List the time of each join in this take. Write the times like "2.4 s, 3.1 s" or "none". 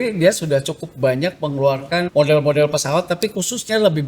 2.1 s